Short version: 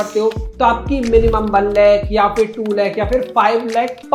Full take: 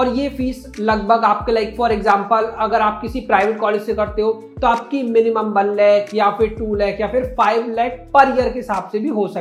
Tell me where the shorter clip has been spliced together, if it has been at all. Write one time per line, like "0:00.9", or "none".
none